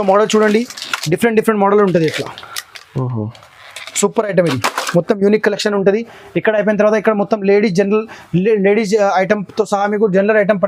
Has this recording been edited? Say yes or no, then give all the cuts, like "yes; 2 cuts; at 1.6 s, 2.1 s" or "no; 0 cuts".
no; 0 cuts